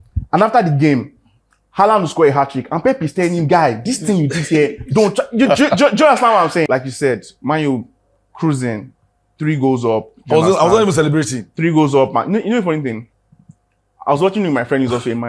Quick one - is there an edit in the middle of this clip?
yes; 1 cut; at 6.7 s

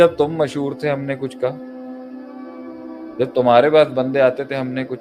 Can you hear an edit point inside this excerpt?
no; 0 cuts

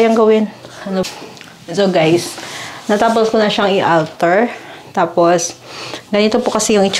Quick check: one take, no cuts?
no; 1 cut; at 1.0 s

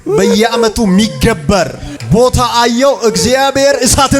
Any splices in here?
yes; 1 cut; at 1.9 s

